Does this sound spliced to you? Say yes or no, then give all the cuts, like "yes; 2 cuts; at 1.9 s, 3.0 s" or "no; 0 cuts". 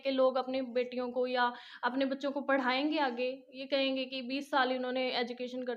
no; 0 cuts